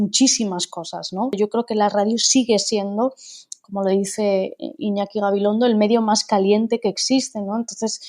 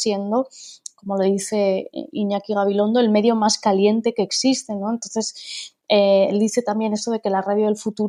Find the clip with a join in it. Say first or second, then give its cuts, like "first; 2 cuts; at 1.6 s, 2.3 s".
first; 1 cut; at 1.4 s